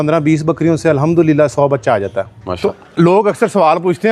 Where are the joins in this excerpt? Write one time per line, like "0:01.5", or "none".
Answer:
0:02.4